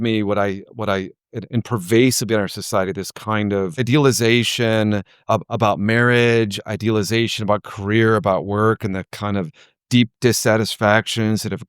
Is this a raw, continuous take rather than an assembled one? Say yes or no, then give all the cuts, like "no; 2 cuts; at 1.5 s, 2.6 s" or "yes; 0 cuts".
no; 2 cuts; at 3.9 s, 5.1 s